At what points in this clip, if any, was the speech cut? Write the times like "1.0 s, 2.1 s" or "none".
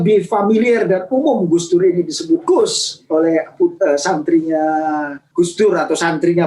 5.2 s